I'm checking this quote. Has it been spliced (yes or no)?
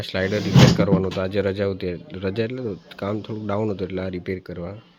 no